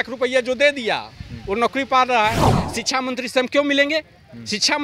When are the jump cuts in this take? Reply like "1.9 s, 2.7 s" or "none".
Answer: 2.5 s